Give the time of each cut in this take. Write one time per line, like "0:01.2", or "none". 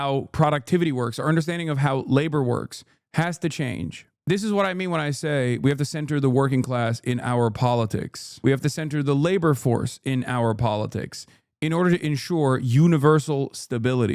none